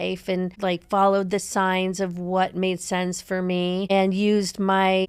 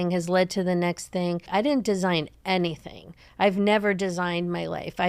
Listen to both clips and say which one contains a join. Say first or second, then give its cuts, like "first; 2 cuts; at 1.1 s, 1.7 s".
second; 1 cut; at 1.5 s